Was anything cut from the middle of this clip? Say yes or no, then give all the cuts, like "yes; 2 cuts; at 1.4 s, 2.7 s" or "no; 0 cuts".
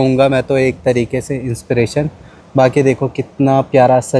no; 0 cuts